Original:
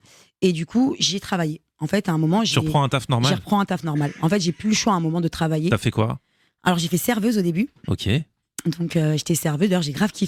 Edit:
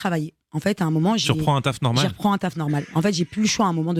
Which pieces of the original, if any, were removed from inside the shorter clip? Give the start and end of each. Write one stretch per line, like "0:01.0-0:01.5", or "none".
none